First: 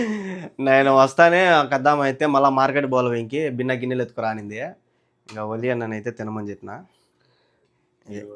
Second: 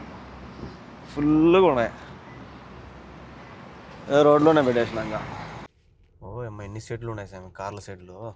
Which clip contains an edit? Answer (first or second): second